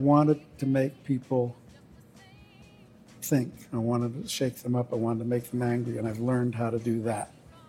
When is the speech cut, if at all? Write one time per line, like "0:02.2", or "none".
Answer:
none